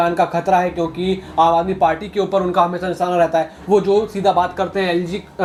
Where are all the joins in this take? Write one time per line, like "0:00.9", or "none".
none